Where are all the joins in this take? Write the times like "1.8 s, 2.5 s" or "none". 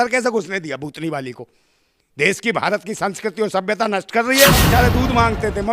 4.7 s

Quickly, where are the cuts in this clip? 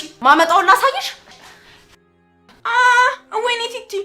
2.6 s

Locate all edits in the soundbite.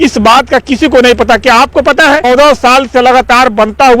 2.3 s

